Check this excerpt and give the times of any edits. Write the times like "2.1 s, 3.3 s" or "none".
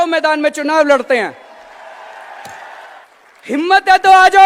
3.0 s